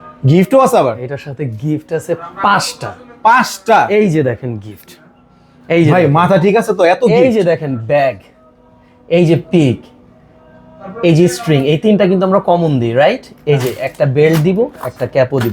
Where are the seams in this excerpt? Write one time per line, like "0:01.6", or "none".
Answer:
none